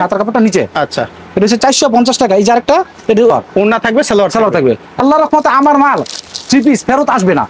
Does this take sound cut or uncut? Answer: uncut